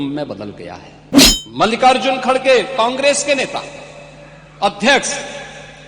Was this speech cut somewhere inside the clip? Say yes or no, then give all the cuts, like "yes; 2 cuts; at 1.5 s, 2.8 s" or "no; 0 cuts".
yes; 1 cut; at 1.0 s